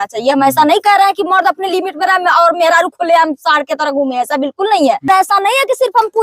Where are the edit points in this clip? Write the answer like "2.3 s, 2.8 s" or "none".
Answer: 5.1 s